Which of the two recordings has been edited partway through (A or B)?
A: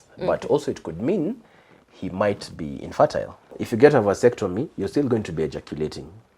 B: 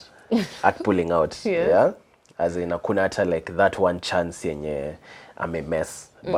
A